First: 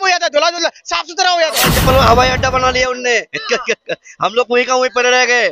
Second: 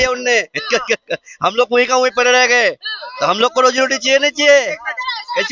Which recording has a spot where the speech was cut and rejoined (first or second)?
first